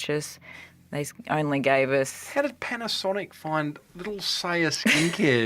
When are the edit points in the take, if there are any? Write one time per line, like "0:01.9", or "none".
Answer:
none